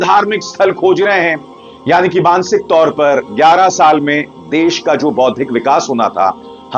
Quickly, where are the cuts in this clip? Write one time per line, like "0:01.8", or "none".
none